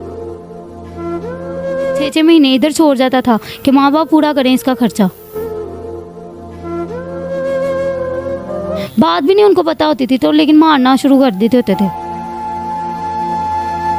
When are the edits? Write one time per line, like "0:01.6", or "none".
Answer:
0:02.1
0:08.8